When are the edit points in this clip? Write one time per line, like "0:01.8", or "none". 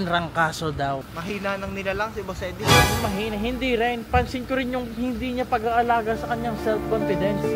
0:01.1